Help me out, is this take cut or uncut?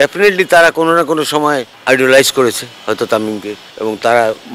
cut